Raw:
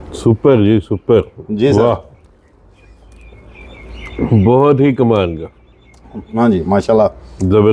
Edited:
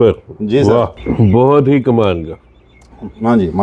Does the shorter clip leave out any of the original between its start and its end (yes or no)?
yes